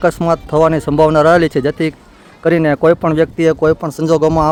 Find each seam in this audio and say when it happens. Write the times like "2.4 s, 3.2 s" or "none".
none

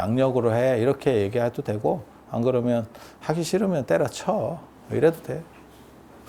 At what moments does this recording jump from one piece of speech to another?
none

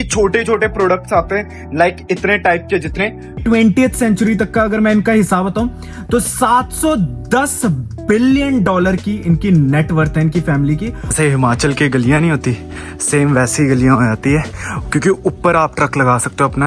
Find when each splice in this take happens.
3.3 s, 11.1 s

